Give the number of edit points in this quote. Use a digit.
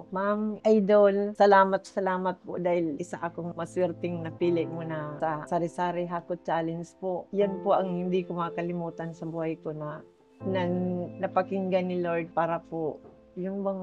0